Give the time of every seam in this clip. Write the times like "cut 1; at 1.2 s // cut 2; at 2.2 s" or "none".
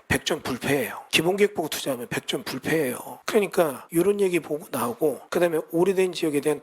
cut 1; at 1.0 s // cut 2; at 3.1 s // cut 3; at 3.8 s // cut 4; at 5.2 s